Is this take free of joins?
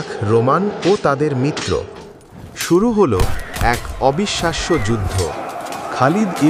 no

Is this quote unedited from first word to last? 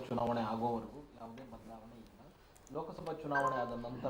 yes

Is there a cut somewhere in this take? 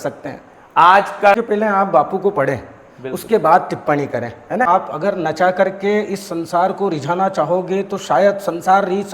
yes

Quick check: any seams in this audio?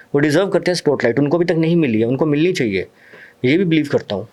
no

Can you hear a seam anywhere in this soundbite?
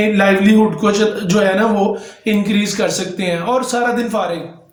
no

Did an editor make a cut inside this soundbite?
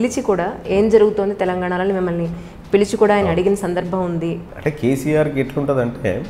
yes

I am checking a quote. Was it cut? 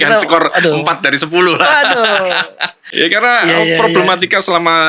yes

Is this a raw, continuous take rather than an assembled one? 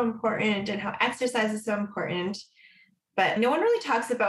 yes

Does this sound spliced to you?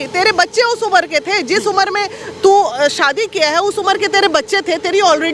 no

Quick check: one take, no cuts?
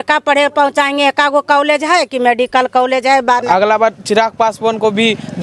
no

